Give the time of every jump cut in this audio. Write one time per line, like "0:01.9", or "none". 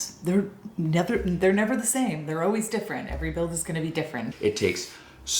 0:04.3